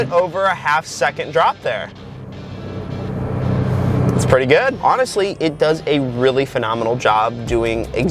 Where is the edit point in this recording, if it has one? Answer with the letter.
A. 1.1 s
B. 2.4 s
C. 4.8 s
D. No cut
C